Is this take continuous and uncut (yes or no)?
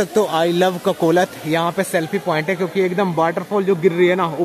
yes